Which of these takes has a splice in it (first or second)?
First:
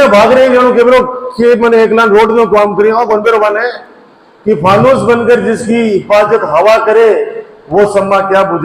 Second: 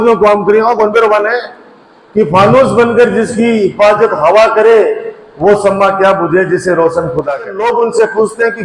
second